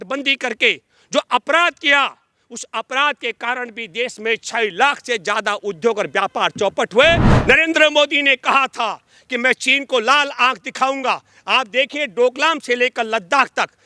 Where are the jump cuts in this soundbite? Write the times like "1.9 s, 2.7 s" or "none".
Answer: 7.3 s